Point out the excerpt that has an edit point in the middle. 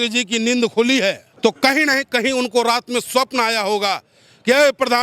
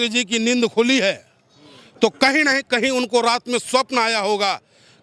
first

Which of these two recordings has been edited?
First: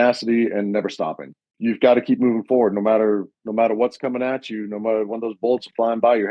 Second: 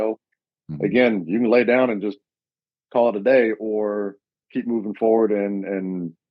first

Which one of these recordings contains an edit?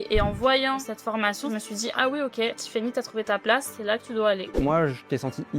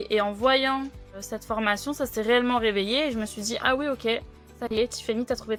first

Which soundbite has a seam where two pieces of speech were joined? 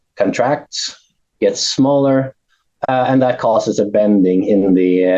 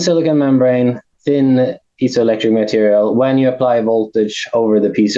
second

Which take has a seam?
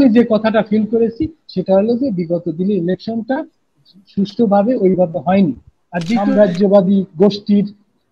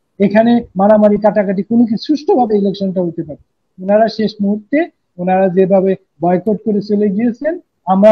first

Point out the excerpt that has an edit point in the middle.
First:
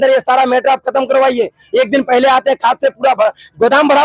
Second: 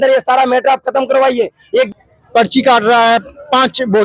second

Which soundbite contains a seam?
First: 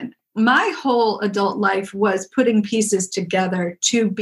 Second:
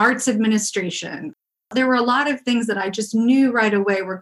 second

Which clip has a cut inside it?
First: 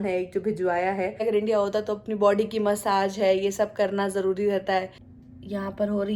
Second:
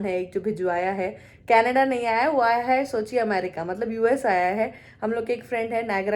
first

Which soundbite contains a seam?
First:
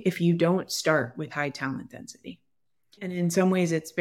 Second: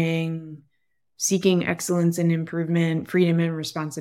first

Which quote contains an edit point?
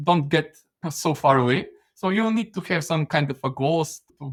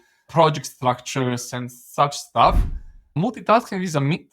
second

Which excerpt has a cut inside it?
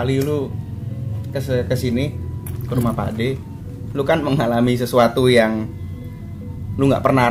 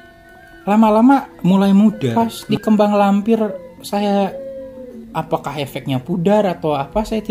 second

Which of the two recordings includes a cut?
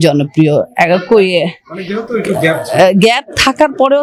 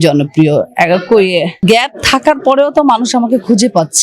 second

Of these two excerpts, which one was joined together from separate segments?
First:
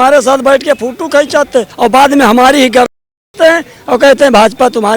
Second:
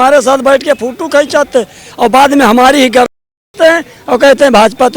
first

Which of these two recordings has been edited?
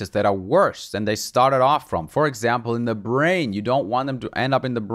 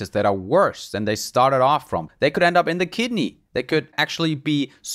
second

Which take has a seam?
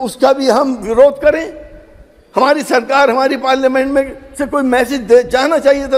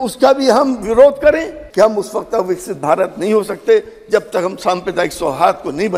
second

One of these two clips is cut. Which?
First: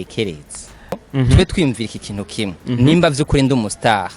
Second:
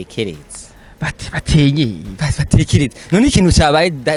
first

